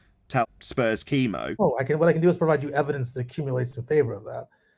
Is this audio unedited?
no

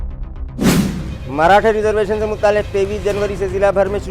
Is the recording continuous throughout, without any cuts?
yes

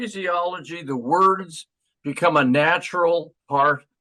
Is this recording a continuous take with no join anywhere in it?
yes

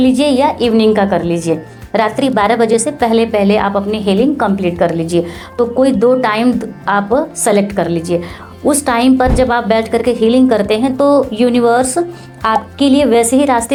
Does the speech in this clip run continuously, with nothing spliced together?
yes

